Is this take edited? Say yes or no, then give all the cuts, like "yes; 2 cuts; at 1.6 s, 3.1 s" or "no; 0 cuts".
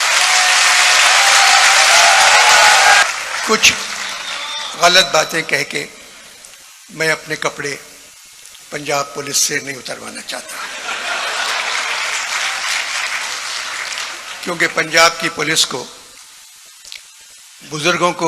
yes; 1 cut; at 3.0 s